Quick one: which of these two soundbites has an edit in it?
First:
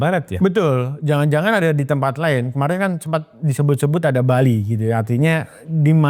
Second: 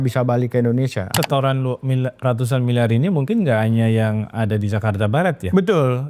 second; 1 cut; at 1.1 s

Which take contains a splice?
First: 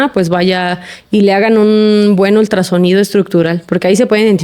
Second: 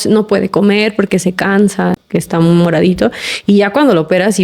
second; 1 cut; at 2.0 s

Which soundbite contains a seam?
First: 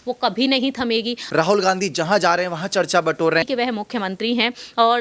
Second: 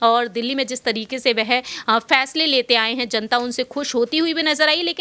first; 2 cuts; at 1.2 s, 3.5 s

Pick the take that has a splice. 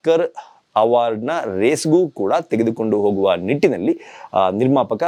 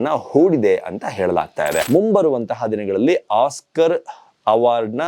second; 1 cut; at 1.8 s

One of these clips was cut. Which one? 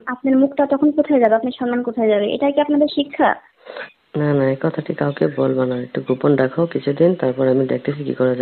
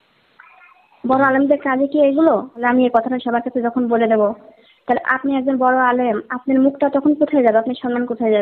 second; 1 cut; at 2.6 s

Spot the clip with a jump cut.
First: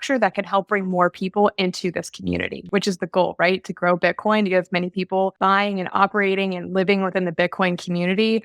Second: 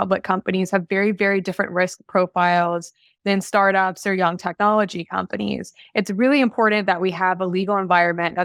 first; 2 cuts; at 2.6 s, 5.3 s

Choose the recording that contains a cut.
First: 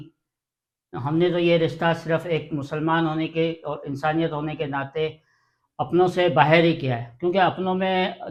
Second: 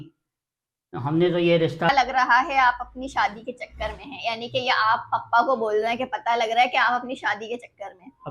second; 1 cut; at 1.9 s

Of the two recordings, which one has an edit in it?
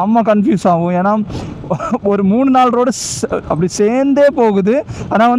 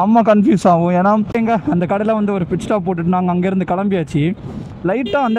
second; 1 cut; at 1.3 s

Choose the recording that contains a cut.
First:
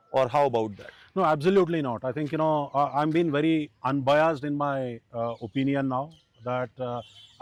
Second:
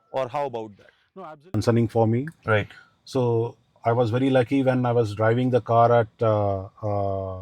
second; 1 cut; at 1.4 s

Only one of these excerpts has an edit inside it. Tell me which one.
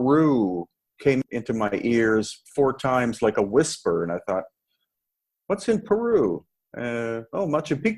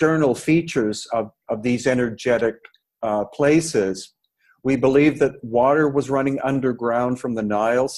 first; 1 cut; at 1.2 s

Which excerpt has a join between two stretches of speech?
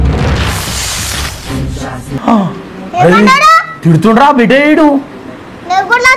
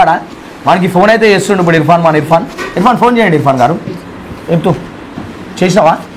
second; 1 cut; at 3.9 s

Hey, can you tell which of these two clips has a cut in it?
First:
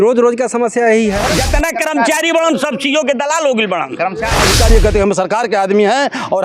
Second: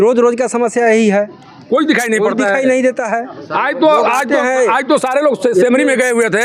first; 2 cuts; at 1.3 s, 4.4 s

